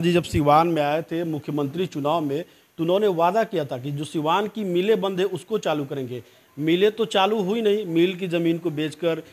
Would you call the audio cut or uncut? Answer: uncut